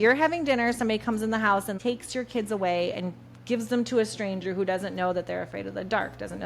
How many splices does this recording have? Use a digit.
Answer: 1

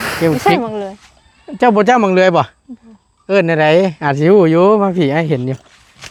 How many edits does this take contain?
0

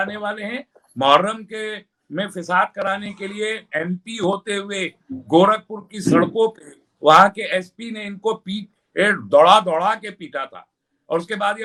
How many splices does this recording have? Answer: 0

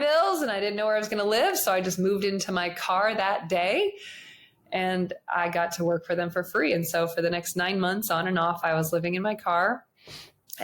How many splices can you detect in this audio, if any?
0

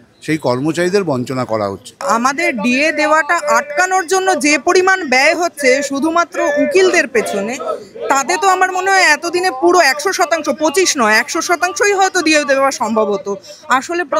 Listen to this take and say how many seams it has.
1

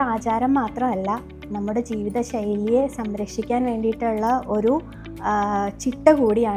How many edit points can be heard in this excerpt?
0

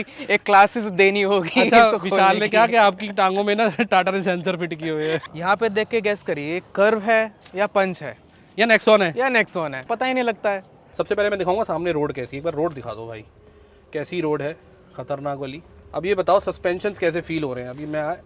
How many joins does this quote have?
3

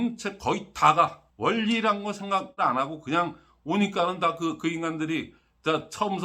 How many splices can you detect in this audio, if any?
2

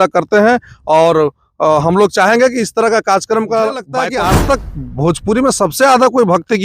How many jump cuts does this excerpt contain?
1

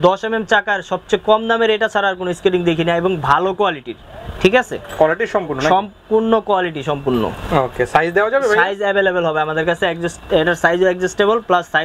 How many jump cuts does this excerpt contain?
0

